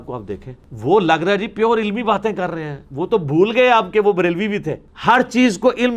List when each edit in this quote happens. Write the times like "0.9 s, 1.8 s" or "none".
none